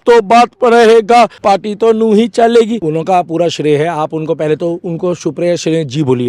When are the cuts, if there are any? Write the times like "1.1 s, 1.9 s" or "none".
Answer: 1.4 s, 2.9 s